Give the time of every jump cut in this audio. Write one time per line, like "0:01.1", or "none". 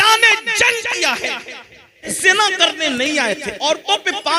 0:02.1